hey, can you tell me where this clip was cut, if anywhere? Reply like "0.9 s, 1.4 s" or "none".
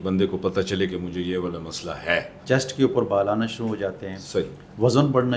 2.4 s